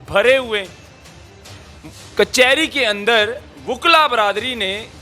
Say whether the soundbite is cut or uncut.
uncut